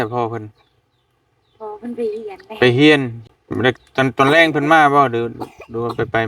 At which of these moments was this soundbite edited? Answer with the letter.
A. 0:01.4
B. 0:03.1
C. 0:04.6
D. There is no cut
B